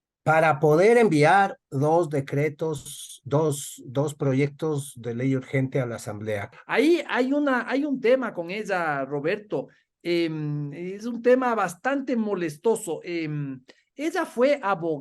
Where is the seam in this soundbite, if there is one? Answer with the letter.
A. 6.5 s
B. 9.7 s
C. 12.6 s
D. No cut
A